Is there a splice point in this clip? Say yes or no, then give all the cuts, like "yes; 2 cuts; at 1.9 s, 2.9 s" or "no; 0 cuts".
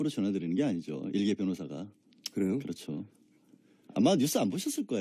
no; 0 cuts